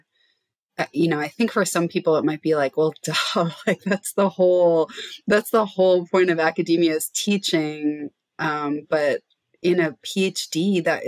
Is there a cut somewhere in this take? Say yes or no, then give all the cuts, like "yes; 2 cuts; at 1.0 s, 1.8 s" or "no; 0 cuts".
no; 0 cuts